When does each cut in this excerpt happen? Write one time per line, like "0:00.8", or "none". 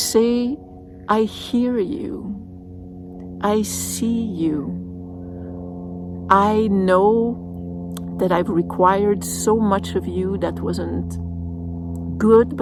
none